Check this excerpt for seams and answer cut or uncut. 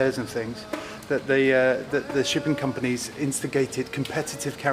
uncut